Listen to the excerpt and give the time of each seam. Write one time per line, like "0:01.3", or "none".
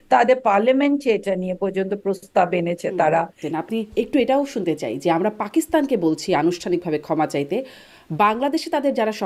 0:03.4